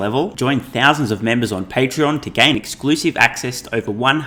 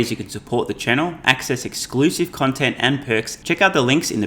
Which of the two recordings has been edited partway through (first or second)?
second